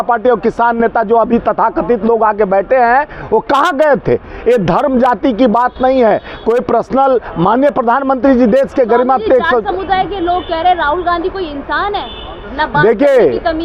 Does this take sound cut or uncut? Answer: uncut